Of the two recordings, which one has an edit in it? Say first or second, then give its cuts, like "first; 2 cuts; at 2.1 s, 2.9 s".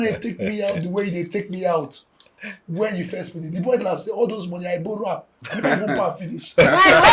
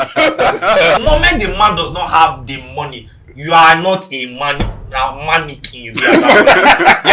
second; 1 cut; at 1.0 s